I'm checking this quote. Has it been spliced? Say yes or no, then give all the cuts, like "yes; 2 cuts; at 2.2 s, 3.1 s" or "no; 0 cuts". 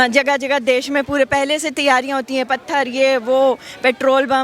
no; 0 cuts